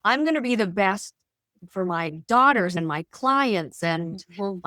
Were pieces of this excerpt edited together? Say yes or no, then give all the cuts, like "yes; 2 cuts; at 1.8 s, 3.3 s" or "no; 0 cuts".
yes; 1 cut; at 2.8 s